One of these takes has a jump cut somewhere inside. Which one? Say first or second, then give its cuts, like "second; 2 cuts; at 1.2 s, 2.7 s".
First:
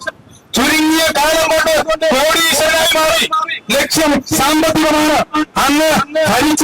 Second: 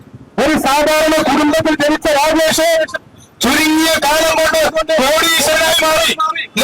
first; 1 cut; at 5.5 s